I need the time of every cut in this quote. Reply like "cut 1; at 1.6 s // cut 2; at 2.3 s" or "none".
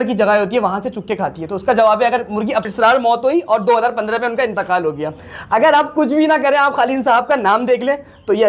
cut 1; at 2.7 s